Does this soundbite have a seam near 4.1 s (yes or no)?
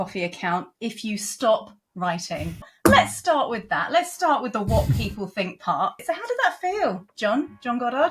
no